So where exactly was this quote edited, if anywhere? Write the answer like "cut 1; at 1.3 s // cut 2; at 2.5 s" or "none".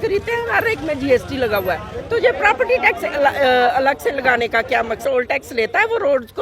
cut 1; at 5.0 s